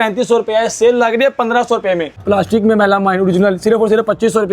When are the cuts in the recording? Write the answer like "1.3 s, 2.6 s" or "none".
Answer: 2.2 s